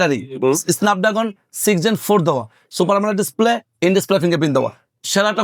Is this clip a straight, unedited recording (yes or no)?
yes